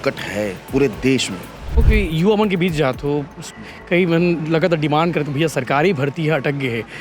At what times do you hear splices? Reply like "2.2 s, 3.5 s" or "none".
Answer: 1.8 s